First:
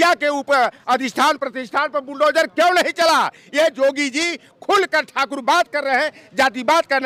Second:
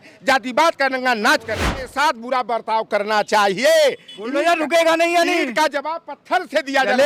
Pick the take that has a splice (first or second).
second